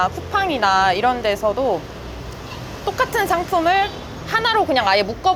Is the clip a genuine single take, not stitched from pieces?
yes; 0 cuts

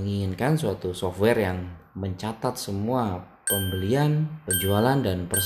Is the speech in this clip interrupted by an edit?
no; 0 cuts

